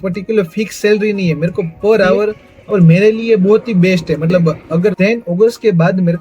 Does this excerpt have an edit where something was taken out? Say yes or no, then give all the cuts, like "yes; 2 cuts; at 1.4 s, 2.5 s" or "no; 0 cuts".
yes; 2 cuts; at 2.5 s, 4.9 s